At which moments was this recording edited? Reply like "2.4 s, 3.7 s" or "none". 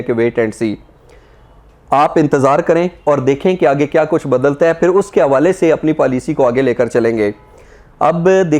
none